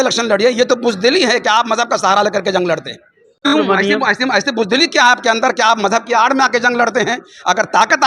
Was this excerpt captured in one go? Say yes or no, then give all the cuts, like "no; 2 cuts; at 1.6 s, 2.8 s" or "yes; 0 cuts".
no; 1 cut; at 3.5 s